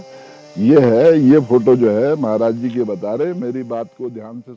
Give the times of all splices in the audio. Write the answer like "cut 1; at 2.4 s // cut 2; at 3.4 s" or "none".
none